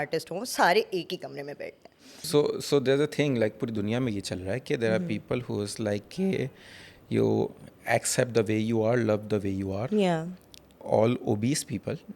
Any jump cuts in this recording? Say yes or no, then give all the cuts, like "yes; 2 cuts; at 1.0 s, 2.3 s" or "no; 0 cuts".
yes; 2 cuts; at 2.2 s, 10.8 s